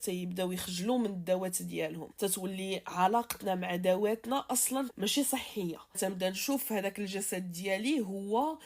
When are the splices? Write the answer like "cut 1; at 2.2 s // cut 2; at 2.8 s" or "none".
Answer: cut 1; at 2.0 s // cut 2; at 4.9 s // cut 3; at 6.0 s